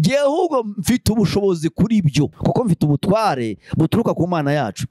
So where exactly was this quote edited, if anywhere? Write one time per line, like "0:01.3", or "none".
none

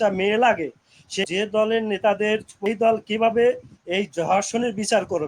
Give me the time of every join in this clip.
0:01.0
0:02.5

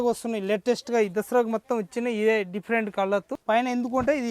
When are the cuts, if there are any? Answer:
0:03.3

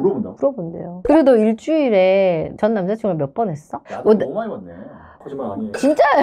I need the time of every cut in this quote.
0:01.0
0:03.7
0:05.0

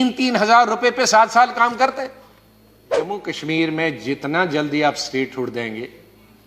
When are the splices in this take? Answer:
0:03.2

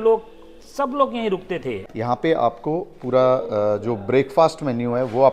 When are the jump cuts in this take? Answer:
0:01.8

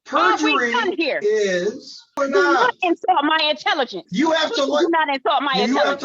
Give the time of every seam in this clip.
0:02.2

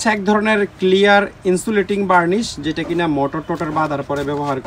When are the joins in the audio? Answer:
none

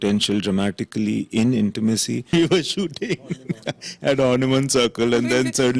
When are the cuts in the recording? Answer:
0:02.3

